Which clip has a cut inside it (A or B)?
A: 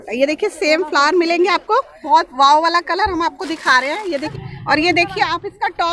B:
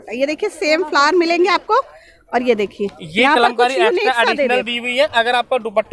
A